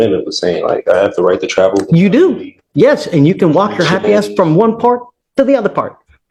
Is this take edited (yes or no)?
no